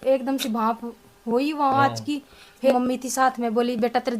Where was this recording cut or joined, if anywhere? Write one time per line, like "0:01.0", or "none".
0:02.7

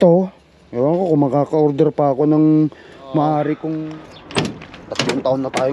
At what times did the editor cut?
0:03.8

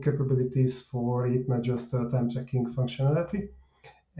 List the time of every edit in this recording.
none

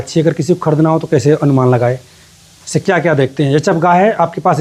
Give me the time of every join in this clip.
none

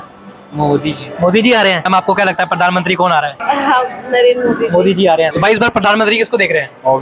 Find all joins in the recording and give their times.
0:01.9
0:03.4
0:05.3

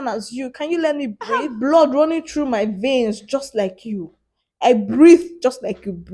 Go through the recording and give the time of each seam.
0:01.5

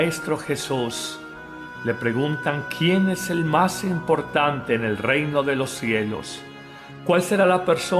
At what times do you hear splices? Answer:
0:04.1

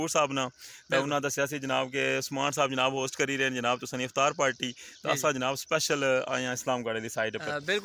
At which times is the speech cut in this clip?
none

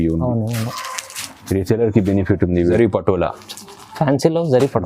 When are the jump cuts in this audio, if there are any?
0:02.8

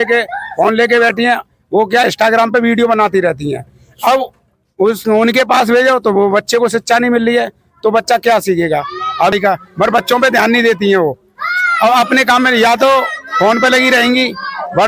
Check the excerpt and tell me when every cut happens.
0:09.3

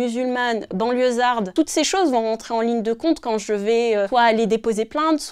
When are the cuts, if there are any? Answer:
0:01.5
0:04.1

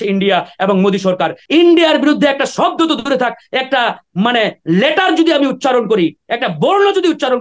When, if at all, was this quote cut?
0:01.4

